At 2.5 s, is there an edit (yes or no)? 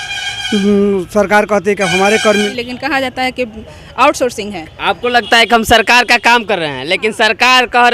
yes